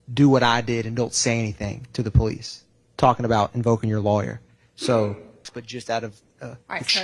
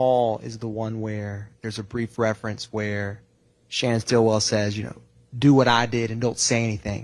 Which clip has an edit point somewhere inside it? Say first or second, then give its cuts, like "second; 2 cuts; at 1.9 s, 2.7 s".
first; 1 cut; at 5.6 s